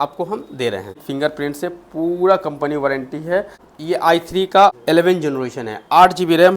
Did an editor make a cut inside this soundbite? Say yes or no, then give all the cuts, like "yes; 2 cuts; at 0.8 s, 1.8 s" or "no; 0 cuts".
yes; 3 cuts; at 1.0 s, 3.7 s, 4.7 s